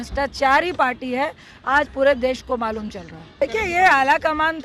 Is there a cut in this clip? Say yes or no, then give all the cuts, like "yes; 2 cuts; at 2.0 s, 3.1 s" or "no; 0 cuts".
yes; 1 cut; at 3.4 s